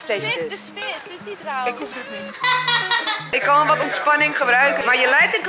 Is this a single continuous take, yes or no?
no